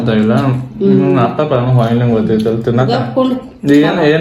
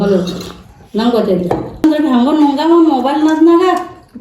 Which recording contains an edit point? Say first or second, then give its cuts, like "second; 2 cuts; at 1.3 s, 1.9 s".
second; 1 cut; at 1.8 s